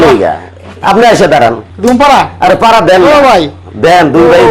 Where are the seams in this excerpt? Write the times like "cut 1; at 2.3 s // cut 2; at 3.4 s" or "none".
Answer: cut 1; at 1.7 s